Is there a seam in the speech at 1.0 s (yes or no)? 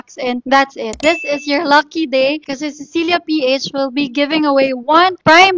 yes